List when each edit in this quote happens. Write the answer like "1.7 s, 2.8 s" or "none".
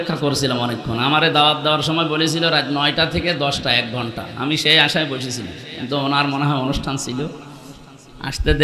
none